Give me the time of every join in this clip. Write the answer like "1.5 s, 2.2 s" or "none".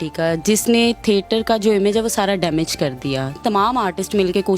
3.4 s